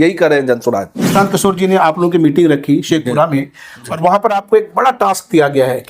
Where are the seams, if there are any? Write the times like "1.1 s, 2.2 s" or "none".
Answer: 1.0 s